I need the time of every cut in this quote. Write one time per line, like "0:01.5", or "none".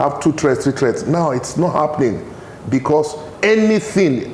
none